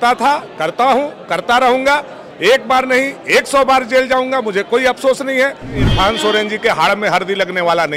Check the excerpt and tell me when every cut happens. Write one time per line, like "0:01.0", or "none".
0:05.9